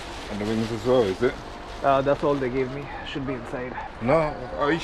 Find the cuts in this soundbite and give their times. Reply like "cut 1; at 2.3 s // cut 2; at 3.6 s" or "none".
cut 1; at 3.8 s